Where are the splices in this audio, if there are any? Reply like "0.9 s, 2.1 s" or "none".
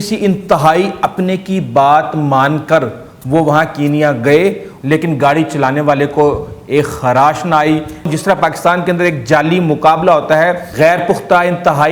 4.7 s, 8.1 s, 10.7 s